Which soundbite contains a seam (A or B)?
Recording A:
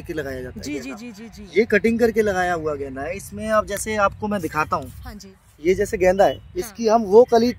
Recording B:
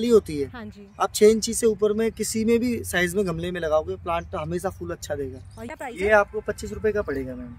B